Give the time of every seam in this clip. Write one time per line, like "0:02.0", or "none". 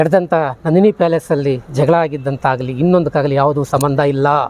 none